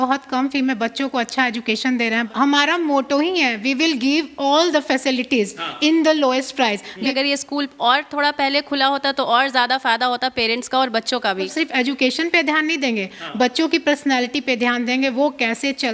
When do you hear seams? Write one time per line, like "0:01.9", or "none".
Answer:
0:02.3
0:07.1
0:11.5